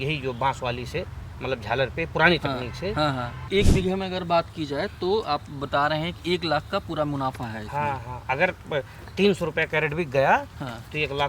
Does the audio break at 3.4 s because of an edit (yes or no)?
yes